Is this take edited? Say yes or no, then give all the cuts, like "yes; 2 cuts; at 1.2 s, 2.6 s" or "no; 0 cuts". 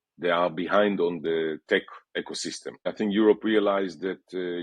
yes; 1 cut; at 2.9 s